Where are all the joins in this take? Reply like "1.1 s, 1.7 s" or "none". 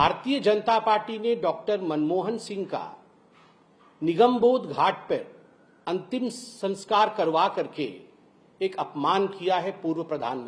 none